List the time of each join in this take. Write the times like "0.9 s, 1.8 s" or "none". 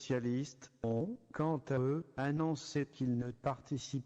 none